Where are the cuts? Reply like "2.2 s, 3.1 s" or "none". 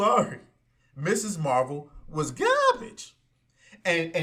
none